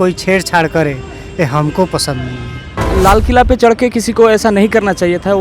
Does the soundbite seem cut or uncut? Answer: cut